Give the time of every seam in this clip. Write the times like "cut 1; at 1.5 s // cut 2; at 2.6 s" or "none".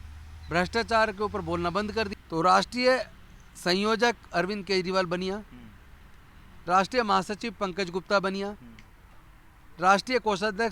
cut 1; at 2.1 s